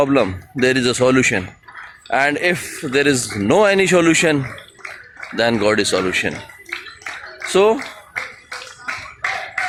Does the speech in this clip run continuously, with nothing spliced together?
yes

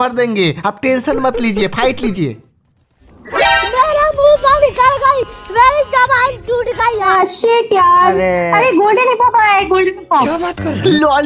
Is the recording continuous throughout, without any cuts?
no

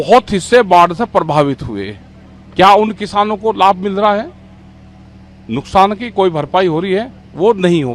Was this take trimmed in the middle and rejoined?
no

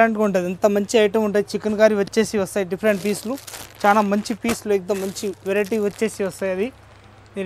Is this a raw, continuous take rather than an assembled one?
yes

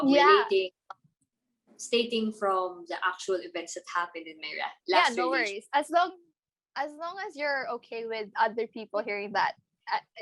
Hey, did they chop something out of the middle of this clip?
no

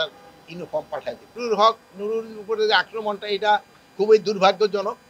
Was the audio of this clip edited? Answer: yes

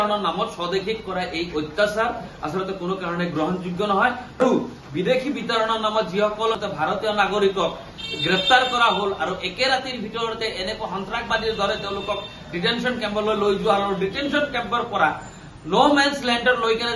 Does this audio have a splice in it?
yes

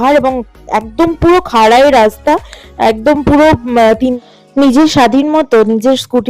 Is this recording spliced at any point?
yes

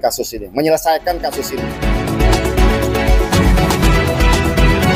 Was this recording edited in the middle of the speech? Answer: yes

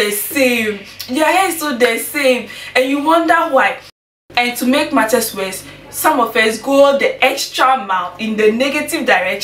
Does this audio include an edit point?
yes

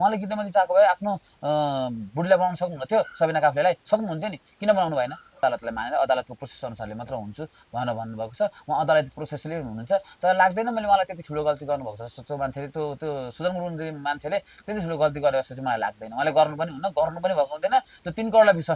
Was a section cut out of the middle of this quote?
yes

